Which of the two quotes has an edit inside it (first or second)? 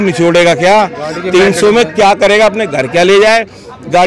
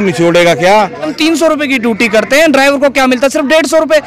second